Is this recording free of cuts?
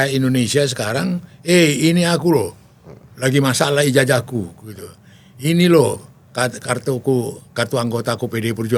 yes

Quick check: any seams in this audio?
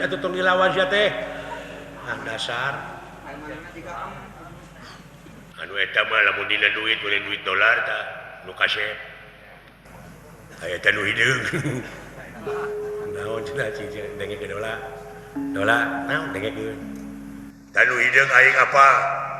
no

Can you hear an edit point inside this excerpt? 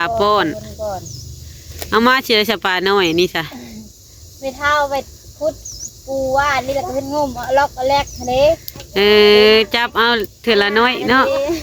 no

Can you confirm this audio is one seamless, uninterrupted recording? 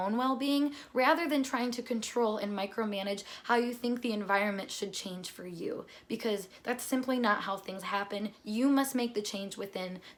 yes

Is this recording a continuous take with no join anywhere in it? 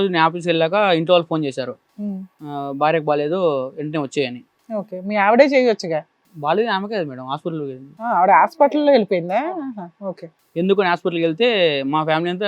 yes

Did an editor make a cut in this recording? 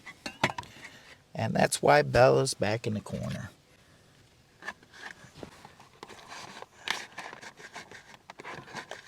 yes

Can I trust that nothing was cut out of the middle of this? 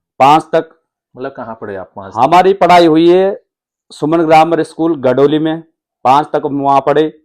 yes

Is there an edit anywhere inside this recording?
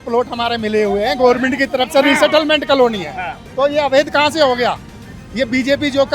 yes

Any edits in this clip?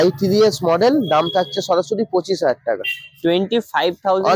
no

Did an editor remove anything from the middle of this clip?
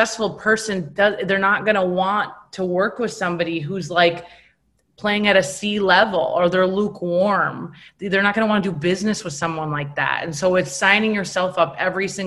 no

